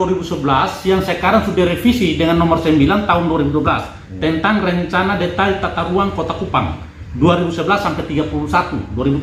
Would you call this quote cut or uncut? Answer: uncut